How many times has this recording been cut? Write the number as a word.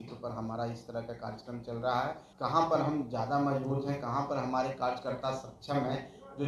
one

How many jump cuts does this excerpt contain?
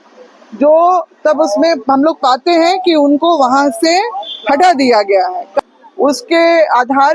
one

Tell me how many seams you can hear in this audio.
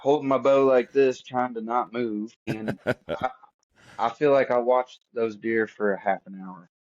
one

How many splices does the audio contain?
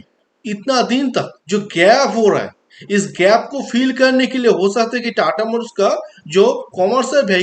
one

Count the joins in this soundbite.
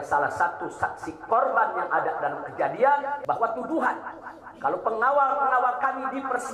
one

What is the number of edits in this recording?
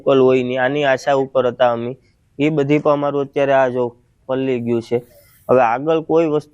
one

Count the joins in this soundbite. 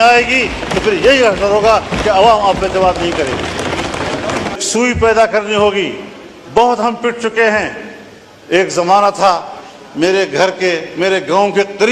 one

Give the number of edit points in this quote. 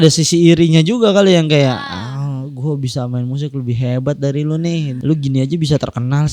one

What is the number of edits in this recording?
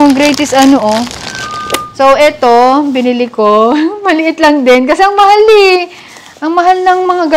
one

